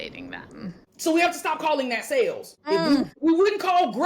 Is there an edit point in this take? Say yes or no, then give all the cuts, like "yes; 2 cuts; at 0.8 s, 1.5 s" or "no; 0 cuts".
yes; 2 cuts; at 0.9 s, 2.8 s